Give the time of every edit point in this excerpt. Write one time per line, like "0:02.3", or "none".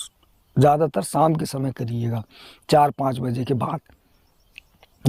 none